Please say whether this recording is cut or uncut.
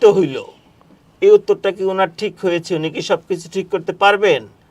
uncut